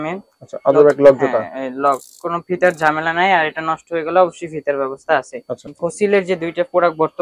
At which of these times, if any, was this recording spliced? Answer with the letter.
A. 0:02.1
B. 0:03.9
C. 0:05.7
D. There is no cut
C